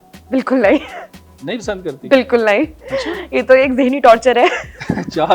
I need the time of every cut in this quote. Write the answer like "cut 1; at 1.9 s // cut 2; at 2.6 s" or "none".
none